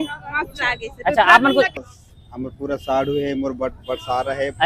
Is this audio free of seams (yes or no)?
no